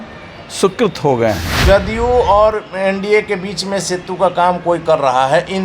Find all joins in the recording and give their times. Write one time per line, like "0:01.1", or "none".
0:01.5